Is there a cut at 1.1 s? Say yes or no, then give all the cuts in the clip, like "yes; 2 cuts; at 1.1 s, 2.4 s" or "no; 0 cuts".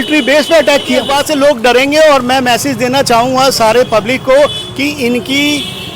yes; 1 cut; at 1.1 s